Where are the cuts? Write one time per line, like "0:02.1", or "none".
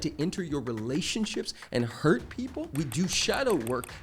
0:02.7